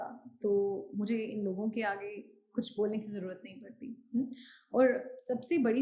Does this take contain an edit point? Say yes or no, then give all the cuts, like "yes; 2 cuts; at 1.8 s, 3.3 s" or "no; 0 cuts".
no; 0 cuts